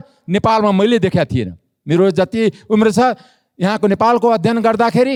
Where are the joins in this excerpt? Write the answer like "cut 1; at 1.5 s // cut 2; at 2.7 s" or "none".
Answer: none

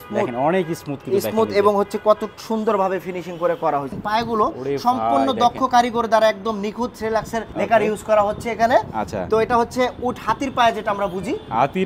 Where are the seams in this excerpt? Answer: cut 1; at 3.9 s // cut 2; at 7.4 s

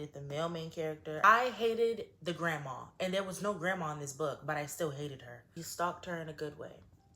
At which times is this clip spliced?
cut 1; at 1.2 s // cut 2; at 5.4 s

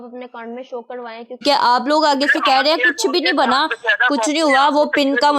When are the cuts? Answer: cut 1; at 1.4 s

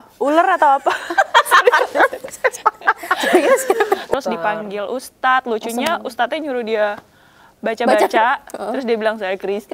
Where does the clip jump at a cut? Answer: cut 1; at 4.1 s

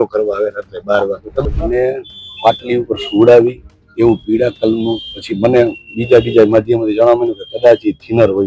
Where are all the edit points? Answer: cut 1; at 1.4 s

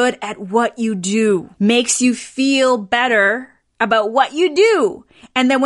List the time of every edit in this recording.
cut 1; at 1.5 s

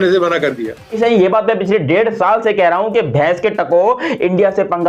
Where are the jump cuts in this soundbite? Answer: cut 1; at 1.0 s

